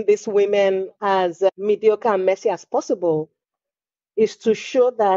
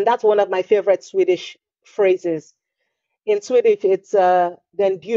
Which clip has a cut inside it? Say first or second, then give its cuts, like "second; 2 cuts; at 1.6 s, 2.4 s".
first; 1 cut; at 1.5 s